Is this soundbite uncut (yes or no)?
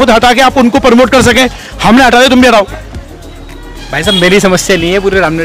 yes